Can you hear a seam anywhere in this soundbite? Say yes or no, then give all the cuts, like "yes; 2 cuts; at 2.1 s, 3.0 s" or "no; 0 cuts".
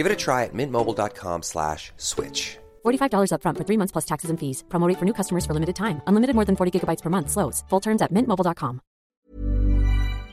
yes; 1 cut; at 9.1 s